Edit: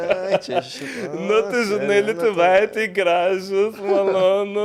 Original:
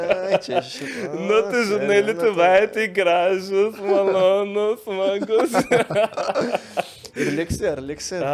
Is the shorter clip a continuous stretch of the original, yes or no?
yes